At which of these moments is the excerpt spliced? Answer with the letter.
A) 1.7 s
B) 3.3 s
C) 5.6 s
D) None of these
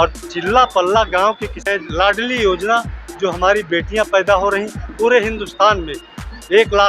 A